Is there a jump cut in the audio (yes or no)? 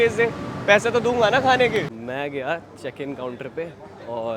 yes